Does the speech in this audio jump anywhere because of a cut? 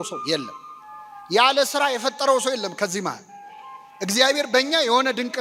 no; 0 cuts

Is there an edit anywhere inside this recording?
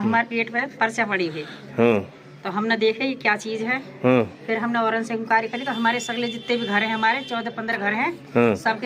no; 0 cuts

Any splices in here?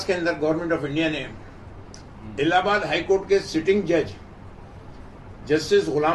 no; 0 cuts

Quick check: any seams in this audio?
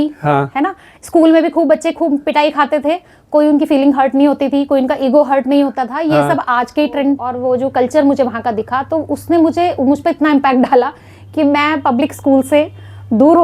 yes; 1 cut; at 7.3 s

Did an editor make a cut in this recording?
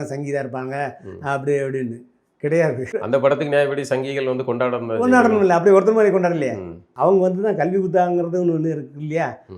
yes; 2 cuts; at 2.9 s, 6.8 s

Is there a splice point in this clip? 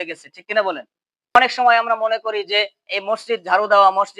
yes; 1 cut; at 1.4 s

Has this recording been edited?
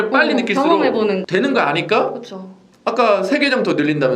yes; 1 cut; at 1.2 s

